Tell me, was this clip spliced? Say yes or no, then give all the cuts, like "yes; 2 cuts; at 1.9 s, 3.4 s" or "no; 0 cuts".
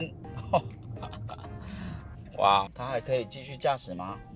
yes; 1 cut; at 2.7 s